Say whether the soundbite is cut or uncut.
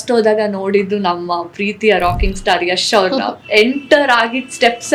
uncut